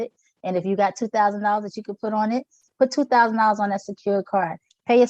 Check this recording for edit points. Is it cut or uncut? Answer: uncut